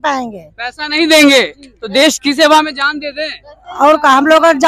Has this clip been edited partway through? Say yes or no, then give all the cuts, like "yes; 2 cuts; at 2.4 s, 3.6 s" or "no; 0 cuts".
no; 0 cuts